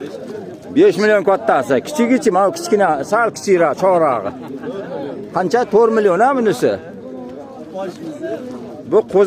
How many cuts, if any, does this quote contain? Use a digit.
0